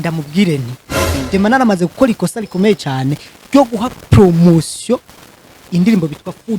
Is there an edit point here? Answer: yes; 1 cut; at 1.0 s

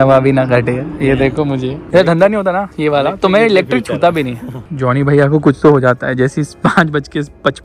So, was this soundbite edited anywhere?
yes; 2 cuts; at 1.8 s, 4.7 s

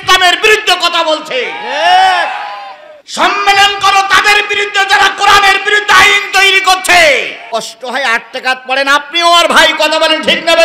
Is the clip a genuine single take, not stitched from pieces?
no; 1 cut; at 7.4 s

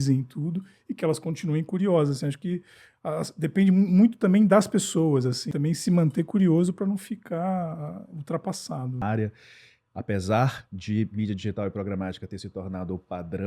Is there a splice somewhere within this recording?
yes; 2 cuts; at 5.4 s, 9.0 s

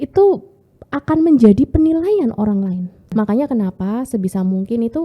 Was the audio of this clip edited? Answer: yes; 1 cut; at 3.1 s

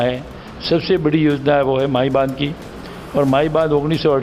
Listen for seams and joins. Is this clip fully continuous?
yes; 0 cuts

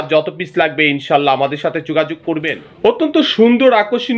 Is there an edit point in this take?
yes; 1 cut; at 2.6 s

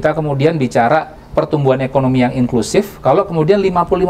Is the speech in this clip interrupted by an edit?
yes; 1 cut; at 1.2 s

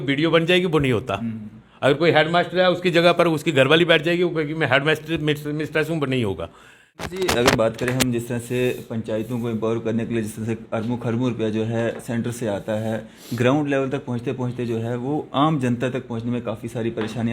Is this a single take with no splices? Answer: no; 1 cut; at 7.1 s

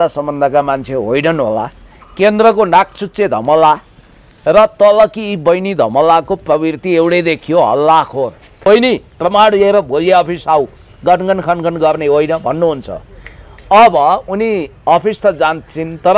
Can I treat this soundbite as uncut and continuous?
no; 1 cut; at 8.6 s

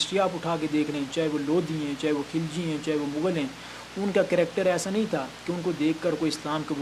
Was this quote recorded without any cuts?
yes; 0 cuts

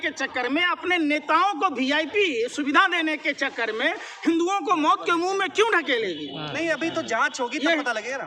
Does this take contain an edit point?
no; 0 cuts

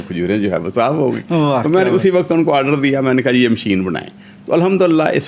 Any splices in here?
no; 0 cuts

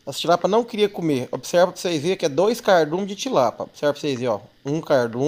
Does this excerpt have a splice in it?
no; 0 cuts

